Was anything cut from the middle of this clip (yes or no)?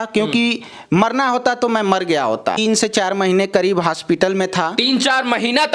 yes